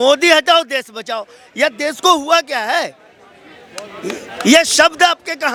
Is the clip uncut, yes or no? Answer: yes